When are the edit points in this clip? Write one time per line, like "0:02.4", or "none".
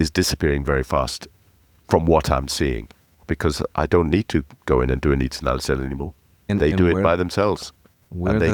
none